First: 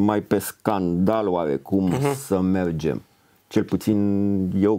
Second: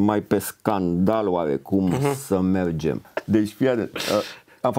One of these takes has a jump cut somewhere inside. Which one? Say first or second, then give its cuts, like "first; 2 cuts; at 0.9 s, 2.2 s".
second; 1 cut; at 3.1 s